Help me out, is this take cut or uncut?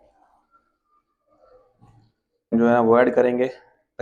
cut